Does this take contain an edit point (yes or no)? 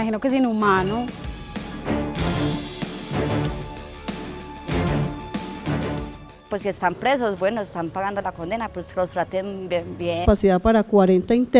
no